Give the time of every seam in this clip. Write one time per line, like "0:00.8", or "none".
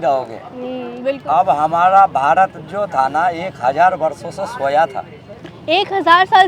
0:01.0